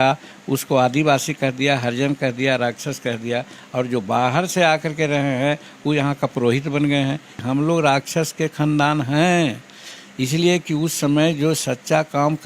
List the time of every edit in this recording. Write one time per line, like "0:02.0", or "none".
0:07.4

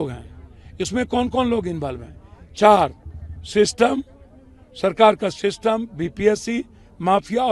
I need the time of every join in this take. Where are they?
none

